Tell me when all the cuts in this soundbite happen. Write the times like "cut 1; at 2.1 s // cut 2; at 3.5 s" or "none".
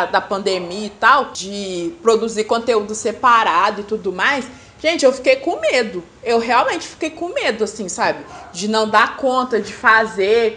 cut 1; at 1.4 s